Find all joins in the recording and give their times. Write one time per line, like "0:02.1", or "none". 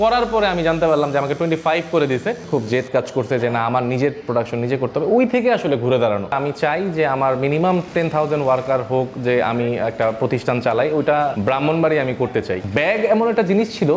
0:06.3
0:12.6

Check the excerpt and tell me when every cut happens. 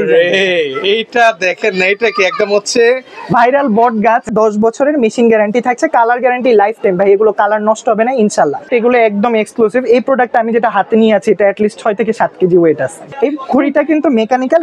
0:04.3
0:08.7
0:13.0

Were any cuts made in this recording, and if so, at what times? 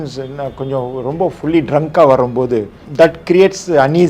0:02.8

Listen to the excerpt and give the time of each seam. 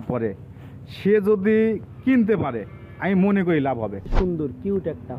0:04.1

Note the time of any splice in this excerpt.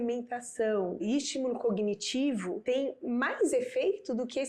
0:01.0
0:02.6

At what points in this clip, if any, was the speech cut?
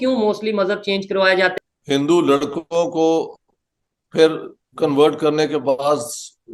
0:01.5

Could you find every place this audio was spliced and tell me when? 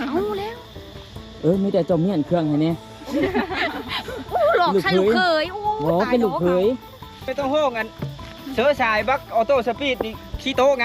0:07.3

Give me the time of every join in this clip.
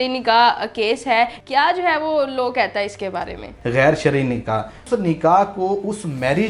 0:01.4
0:03.5
0:04.8

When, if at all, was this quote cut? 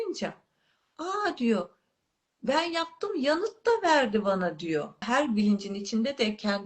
0:05.1

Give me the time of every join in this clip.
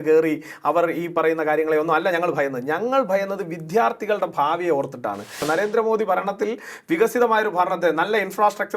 0:05.4

